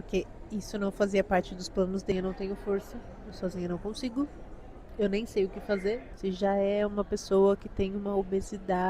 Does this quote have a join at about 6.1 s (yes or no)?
yes